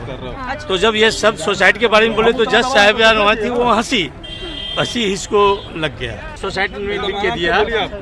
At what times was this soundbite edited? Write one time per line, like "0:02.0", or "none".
0:06.4